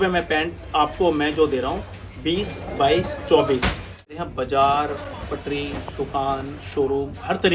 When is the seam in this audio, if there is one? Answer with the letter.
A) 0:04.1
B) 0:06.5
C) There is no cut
A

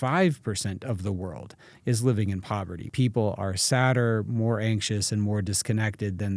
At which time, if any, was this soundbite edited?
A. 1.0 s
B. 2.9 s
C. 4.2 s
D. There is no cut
B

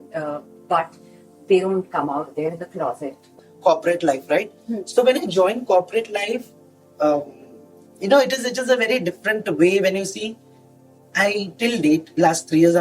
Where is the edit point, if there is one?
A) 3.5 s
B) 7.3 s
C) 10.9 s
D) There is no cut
A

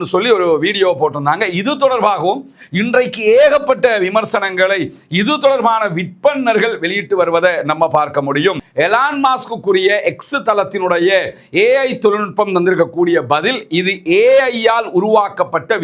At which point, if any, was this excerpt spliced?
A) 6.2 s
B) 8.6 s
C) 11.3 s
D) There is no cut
B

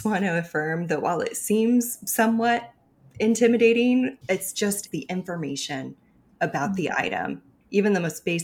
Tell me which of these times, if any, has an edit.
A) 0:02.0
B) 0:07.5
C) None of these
B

